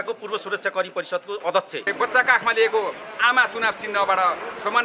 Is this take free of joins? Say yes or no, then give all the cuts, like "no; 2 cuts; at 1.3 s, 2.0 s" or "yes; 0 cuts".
no; 1 cut; at 1.8 s